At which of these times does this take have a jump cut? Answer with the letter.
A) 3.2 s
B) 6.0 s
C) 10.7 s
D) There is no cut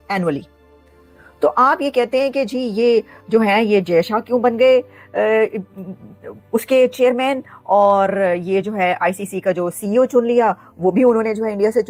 D